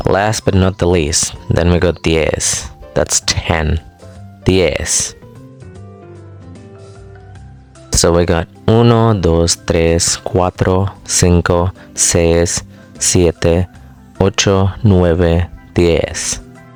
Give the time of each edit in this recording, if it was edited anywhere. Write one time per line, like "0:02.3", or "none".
none